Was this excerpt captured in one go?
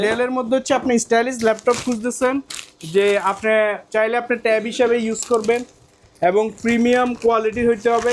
yes; 0 cuts

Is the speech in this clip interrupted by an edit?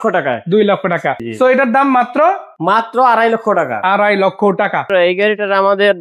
yes; 3 cuts; at 1.3 s, 2.5 s, 4.9 s

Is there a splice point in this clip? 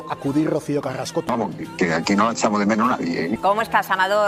no; 0 cuts

